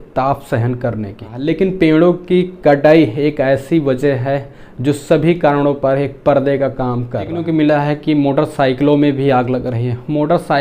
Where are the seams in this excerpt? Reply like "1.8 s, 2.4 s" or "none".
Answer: 1.3 s, 7.4 s